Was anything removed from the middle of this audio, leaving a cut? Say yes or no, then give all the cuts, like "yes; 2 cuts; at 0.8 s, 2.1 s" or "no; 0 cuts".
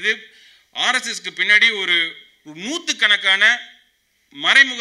no; 0 cuts